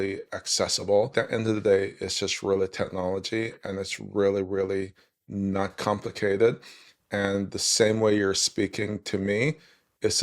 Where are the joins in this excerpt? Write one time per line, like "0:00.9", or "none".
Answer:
0:01.1